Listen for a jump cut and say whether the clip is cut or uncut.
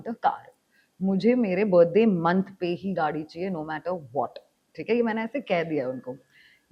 uncut